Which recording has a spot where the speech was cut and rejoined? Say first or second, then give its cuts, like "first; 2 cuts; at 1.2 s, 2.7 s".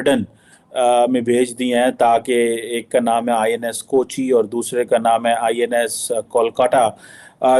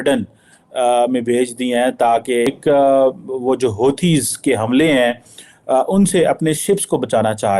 second; 1 cut; at 2.5 s